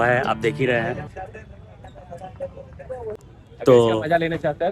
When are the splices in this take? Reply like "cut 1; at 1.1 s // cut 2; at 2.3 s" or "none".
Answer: cut 1; at 3.2 s